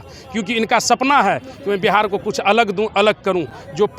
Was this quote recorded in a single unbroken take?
yes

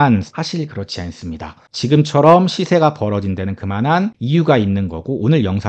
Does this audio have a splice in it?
yes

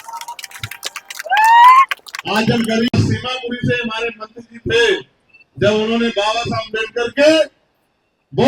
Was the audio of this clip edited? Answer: yes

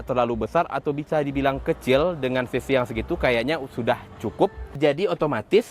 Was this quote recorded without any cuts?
no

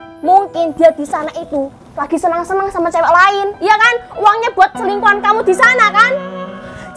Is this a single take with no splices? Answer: yes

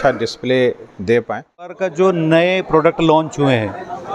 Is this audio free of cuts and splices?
no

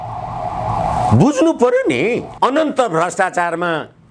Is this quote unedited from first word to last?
no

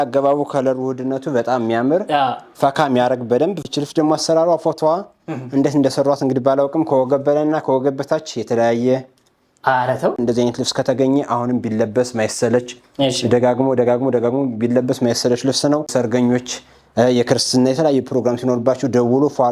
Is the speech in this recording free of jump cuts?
no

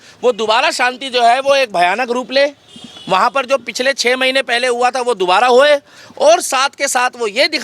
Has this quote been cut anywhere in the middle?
no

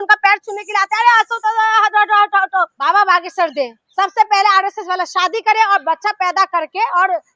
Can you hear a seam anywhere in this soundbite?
yes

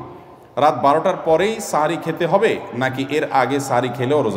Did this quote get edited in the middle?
no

